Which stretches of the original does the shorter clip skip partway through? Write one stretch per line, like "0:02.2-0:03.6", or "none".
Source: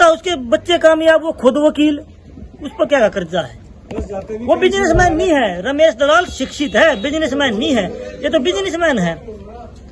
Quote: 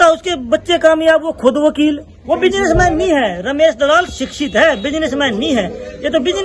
0:02.1-0:04.3